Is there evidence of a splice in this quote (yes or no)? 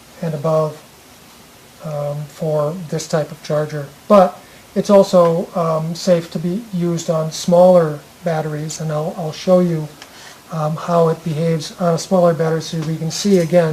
yes